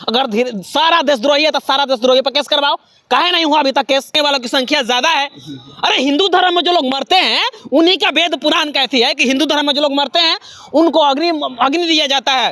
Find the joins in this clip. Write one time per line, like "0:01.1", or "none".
0:04.1